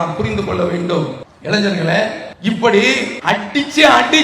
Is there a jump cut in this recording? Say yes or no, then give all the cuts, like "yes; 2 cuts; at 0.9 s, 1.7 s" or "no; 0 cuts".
yes; 3 cuts; at 1.3 s, 2.3 s, 3.1 s